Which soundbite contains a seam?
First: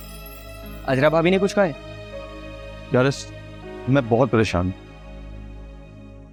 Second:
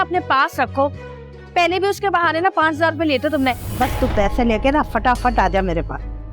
second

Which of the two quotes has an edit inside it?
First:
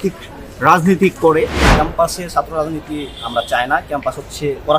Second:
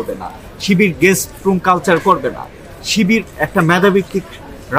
first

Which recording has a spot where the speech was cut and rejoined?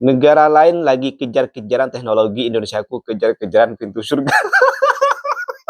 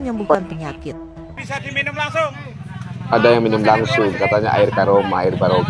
second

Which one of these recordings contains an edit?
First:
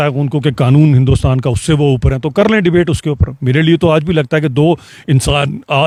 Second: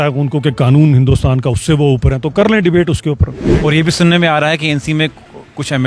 second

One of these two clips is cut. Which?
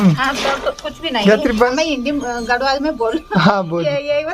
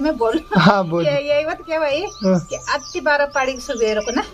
first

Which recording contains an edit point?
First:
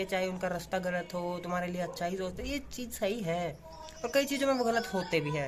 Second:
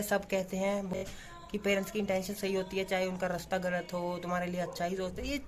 second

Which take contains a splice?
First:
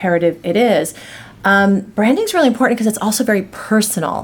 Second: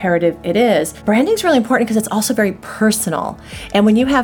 second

